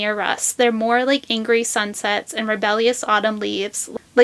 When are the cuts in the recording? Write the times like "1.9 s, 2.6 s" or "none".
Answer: none